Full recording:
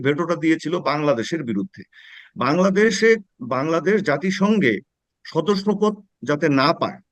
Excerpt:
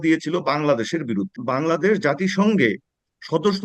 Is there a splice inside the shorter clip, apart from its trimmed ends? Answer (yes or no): yes